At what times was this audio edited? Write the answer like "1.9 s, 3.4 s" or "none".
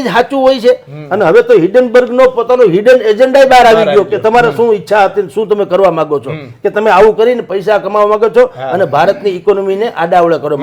none